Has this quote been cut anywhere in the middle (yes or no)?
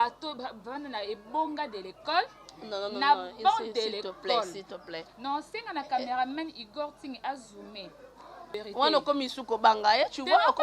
yes